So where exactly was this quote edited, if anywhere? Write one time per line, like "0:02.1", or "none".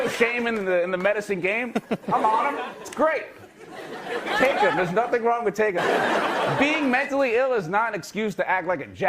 0:05.8